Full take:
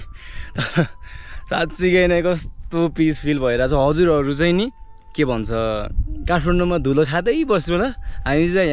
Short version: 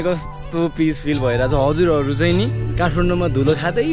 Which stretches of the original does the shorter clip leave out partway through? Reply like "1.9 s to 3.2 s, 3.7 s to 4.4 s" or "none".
4.8 s to 6.1 s

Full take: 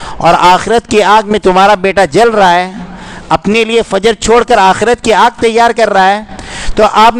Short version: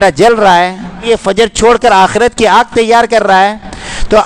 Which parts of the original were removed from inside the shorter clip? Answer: 3.0 s to 3.7 s

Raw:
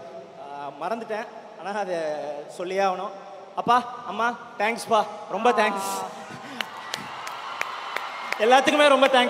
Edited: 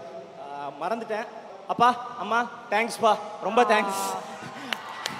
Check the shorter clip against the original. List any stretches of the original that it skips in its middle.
1.4 s to 3.3 s

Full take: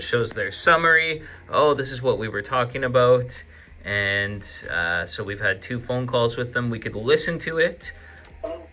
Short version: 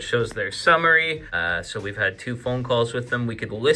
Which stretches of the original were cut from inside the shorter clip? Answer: 1.3 s to 4.8 s

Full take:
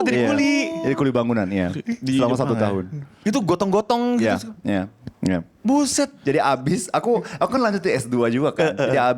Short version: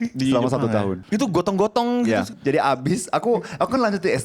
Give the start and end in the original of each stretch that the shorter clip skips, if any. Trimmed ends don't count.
2.9 s to 3.1 s, 4.5 s to 6.2 s

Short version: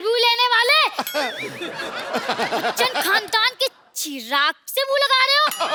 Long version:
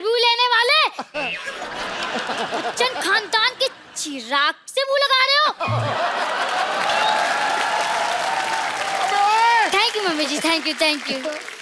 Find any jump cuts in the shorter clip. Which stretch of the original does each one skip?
none

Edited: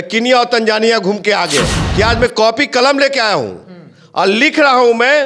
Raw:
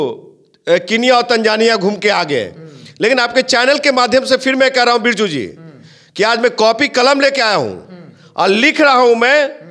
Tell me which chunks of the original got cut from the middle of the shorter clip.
2.6 s to 6.0 s

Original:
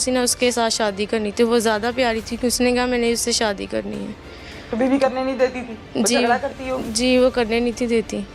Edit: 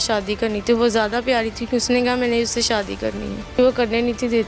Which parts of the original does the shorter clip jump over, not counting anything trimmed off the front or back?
4.3 s to 7.2 s

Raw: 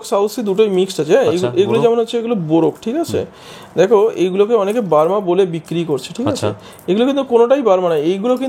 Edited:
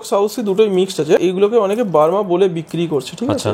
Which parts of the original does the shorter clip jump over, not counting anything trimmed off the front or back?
1.2 s to 4.1 s

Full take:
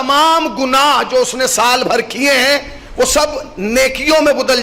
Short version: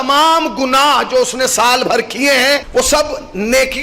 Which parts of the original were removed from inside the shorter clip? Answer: 2.7 s to 2.9 s

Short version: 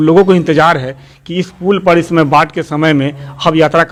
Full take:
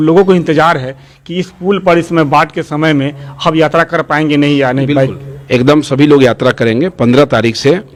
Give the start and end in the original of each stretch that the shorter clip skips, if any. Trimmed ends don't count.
none

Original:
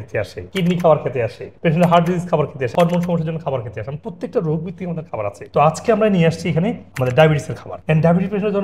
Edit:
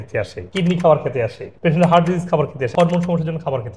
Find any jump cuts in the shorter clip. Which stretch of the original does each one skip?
none

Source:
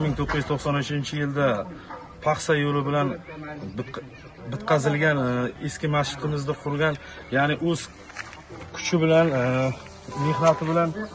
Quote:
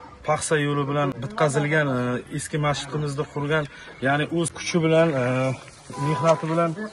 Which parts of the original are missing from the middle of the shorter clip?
3.2 s to 4.5 s, 7.9 s to 8.8 s

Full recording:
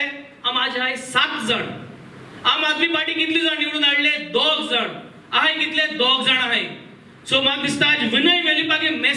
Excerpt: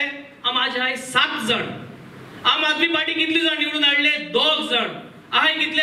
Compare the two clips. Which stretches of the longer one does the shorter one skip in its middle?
none

